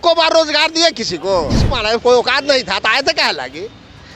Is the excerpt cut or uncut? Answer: cut